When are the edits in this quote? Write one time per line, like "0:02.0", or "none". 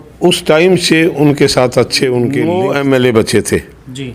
0:02.5